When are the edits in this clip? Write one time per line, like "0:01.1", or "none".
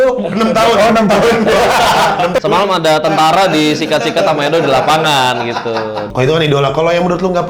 0:02.4
0:06.1